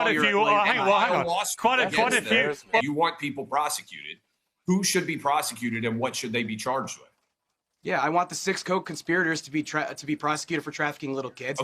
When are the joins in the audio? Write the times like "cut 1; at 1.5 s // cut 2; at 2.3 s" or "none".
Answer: cut 1; at 2.8 s